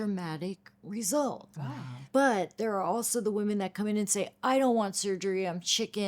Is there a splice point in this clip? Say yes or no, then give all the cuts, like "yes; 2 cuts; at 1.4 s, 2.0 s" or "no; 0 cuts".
yes; 1 cut; at 2.0 s